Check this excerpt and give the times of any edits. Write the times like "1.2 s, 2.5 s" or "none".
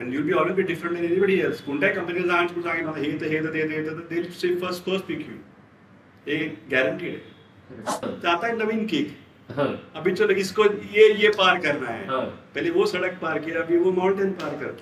8.0 s